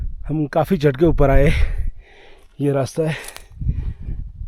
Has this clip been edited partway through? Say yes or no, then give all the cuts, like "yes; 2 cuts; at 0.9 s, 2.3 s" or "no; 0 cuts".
no; 0 cuts